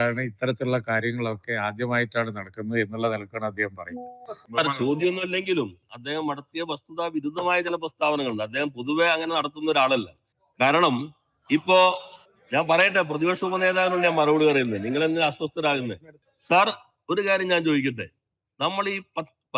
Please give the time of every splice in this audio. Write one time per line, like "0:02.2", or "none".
0:04.4